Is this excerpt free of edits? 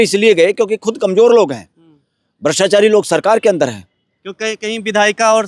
yes; 0 cuts

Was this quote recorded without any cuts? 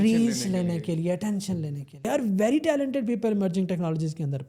no; 1 cut; at 2.1 s

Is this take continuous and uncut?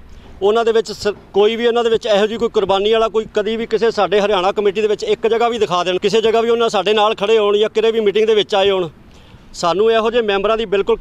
no; 1 cut; at 6.0 s

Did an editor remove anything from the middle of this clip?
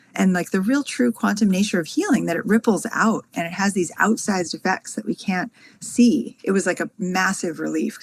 yes; 1 cut; at 6.3 s

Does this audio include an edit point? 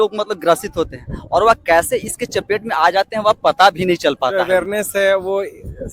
yes; 1 cut; at 4.3 s

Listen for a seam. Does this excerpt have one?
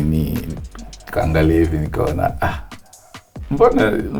no; 0 cuts

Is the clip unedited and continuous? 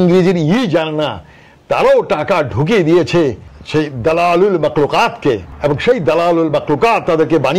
no; 1 cut; at 5.5 s

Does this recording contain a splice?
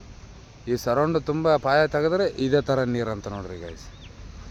no; 0 cuts

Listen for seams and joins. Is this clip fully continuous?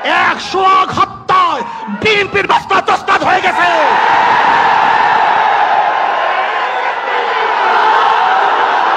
yes; 0 cuts

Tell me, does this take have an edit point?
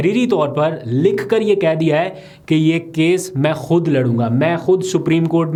no; 0 cuts

